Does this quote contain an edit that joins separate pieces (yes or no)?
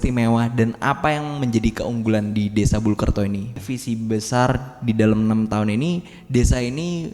yes